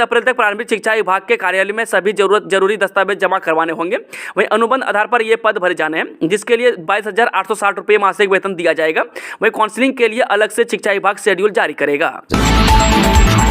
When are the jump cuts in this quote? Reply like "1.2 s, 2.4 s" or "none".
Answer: 12.2 s